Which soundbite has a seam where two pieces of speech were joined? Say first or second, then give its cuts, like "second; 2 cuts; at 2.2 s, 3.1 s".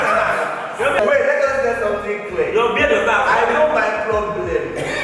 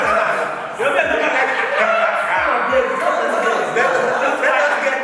first; 1 cut; at 1.0 s